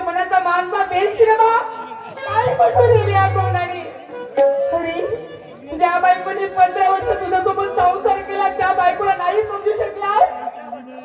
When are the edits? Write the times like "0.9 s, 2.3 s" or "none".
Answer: none